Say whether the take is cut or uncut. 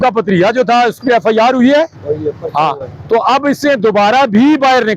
uncut